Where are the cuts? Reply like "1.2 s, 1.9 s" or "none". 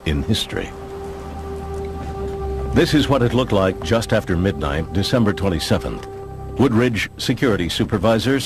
2.8 s